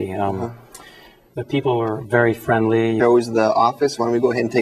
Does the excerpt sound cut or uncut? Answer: uncut